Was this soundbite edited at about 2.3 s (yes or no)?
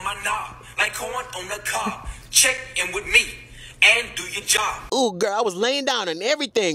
no